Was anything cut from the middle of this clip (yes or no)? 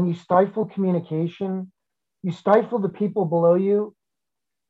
yes